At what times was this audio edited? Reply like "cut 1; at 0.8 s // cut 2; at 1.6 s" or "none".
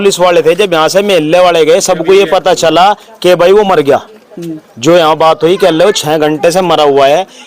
none

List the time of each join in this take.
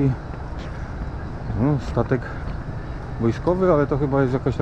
none

